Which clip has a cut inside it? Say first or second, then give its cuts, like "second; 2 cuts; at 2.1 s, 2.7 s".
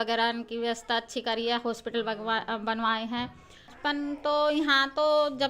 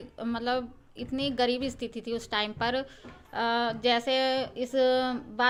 first; 1 cut; at 3.7 s